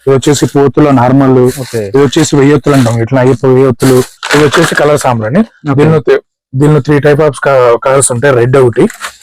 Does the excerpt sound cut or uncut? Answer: cut